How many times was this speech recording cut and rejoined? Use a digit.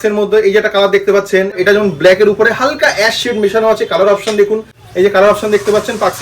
2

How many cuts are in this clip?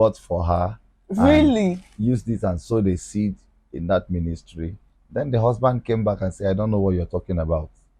0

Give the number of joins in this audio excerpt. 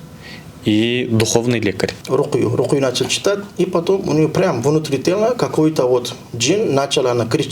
1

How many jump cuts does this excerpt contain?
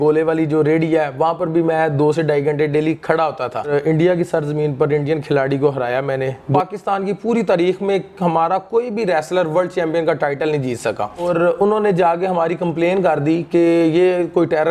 3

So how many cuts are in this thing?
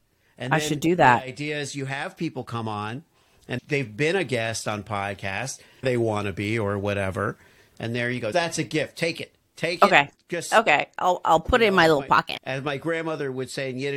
2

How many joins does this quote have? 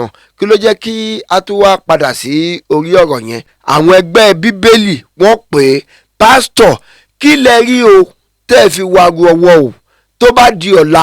1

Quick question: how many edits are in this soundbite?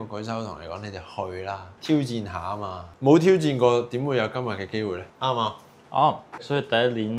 0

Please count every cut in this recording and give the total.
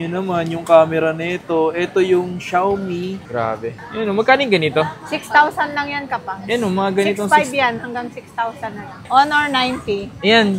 2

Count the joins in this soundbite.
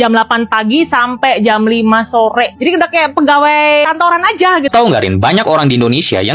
1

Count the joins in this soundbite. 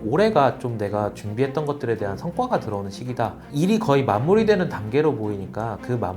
1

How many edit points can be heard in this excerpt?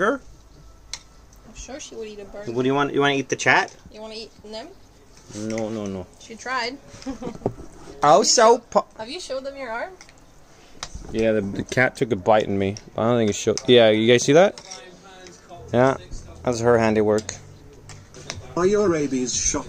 1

